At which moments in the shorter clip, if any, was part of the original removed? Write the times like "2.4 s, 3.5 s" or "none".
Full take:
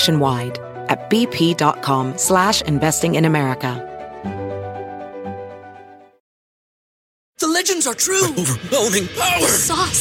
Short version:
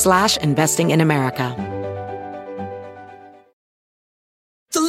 1.5 s